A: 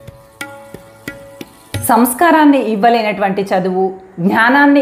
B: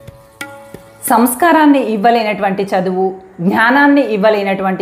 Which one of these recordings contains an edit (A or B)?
B